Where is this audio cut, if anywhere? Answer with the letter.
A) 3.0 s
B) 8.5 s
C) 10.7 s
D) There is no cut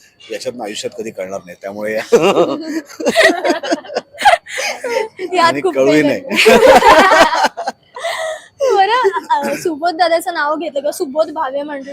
D